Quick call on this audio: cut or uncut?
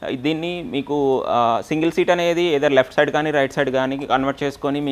uncut